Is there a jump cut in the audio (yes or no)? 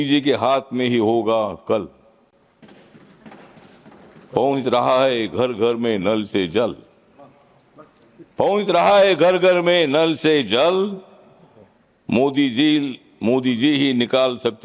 no